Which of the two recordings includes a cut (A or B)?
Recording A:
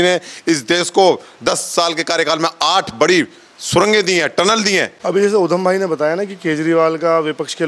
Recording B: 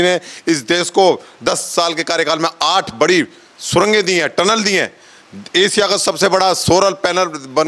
A